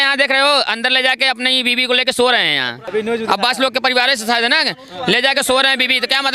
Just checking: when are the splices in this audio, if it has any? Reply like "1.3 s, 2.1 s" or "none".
2.8 s